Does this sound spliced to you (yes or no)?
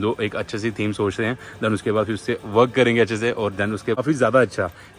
no